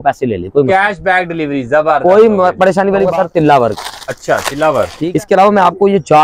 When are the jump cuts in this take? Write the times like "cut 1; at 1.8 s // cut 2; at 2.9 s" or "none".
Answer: cut 1; at 3.1 s // cut 2; at 5.0 s